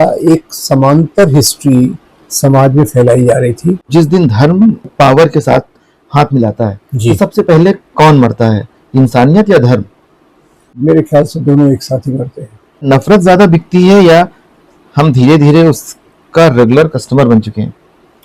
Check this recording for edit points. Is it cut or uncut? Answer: cut